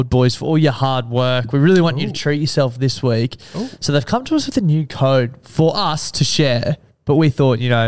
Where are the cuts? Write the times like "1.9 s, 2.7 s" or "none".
none